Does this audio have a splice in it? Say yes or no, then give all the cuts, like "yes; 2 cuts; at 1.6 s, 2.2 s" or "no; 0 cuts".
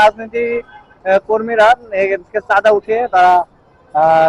no; 0 cuts